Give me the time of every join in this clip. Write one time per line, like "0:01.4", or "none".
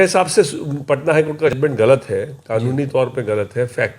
0:01.6

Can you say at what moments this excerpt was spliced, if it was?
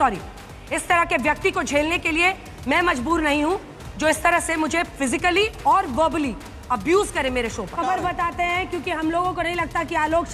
0:07.7

